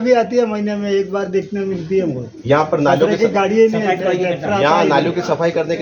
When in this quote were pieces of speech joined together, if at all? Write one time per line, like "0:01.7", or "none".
none